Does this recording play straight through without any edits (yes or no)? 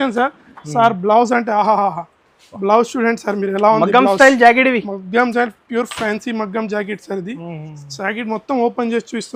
yes